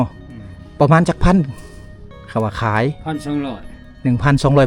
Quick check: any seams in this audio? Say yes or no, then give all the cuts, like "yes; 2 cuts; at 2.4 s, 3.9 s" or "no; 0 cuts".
no; 0 cuts